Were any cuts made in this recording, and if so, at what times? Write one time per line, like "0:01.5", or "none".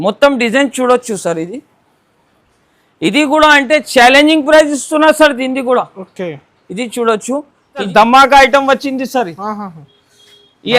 0:07.9

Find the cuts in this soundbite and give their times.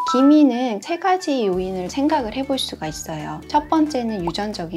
0:00.8
0:01.9

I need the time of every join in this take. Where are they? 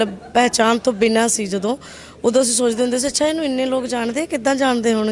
none

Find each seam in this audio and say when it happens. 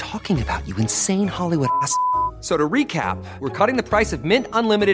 none

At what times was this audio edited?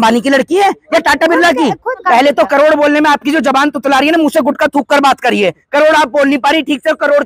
0:02.0

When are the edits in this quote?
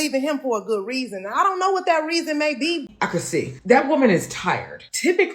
0:02.9

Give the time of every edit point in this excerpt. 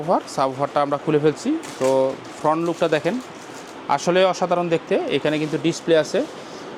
none

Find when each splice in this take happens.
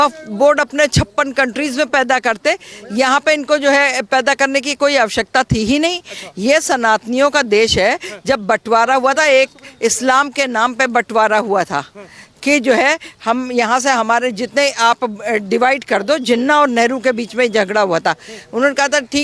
none

